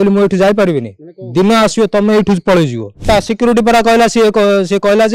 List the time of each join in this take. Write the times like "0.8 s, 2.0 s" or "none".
3.0 s